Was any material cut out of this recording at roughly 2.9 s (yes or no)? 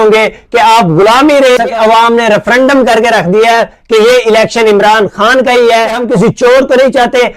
no